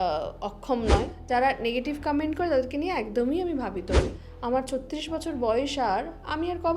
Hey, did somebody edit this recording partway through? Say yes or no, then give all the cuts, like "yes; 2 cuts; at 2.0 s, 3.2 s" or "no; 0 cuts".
yes; 2 cuts; at 1.1 s, 4.2 s